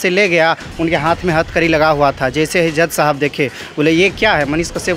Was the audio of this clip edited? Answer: no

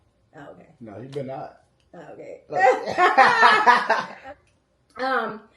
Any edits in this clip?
yes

